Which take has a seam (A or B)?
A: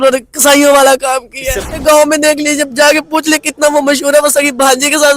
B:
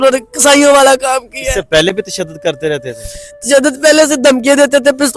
A